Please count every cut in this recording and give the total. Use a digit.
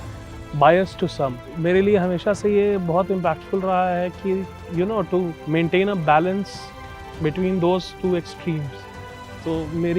3